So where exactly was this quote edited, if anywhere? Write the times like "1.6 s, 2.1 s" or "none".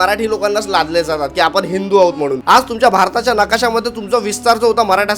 2.4 s